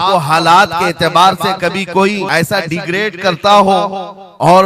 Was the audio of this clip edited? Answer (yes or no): yes